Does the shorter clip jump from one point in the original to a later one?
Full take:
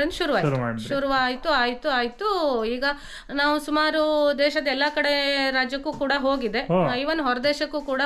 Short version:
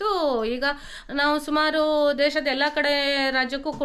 no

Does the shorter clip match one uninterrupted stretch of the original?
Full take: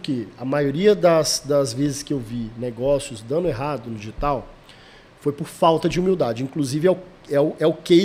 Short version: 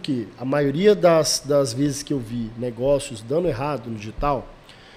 yes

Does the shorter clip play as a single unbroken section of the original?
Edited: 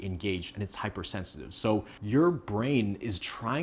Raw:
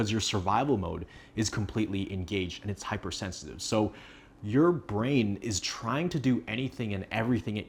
no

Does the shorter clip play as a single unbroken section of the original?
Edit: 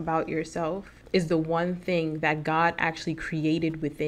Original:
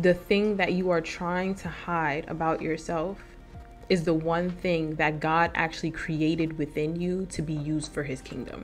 no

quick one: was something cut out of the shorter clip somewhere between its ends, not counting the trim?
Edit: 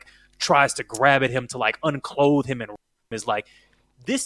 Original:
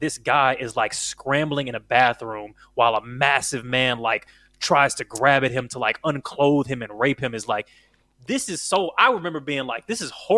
no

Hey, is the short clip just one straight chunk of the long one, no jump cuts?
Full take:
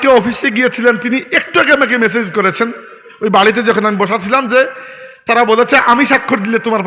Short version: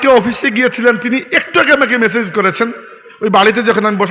yes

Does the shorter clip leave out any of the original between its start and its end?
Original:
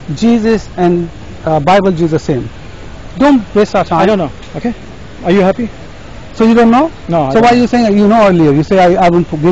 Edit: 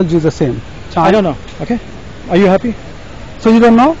yes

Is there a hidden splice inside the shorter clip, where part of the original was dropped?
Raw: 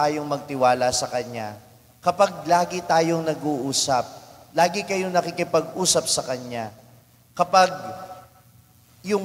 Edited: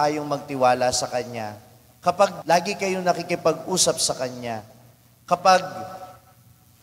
yes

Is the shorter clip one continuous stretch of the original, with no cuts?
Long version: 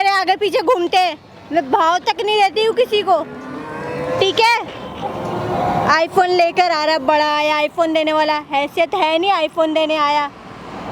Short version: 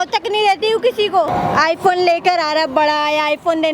no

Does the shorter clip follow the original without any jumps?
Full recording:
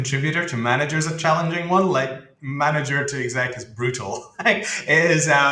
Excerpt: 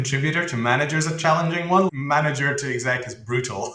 no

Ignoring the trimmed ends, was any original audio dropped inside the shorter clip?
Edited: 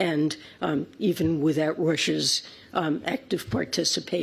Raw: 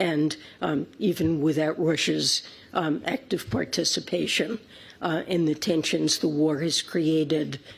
no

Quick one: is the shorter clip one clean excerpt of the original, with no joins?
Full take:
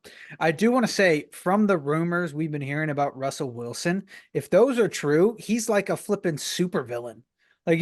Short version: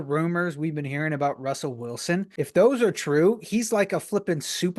no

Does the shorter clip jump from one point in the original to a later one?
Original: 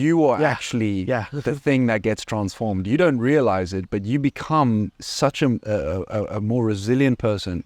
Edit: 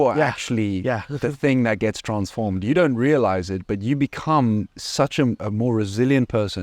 yes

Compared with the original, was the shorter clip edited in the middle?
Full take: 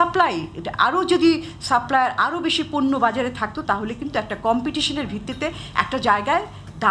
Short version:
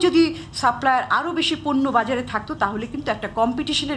no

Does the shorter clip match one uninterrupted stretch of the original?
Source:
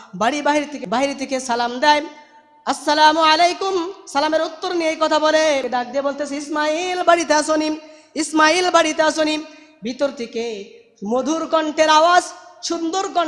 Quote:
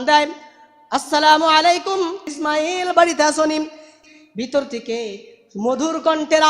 no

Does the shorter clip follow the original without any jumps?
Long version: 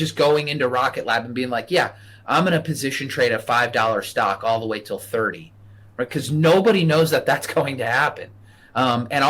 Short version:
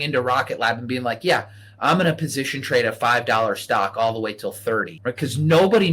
no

